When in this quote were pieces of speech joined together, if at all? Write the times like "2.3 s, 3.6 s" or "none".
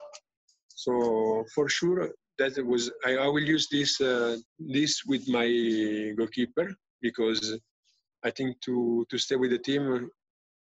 4.5 s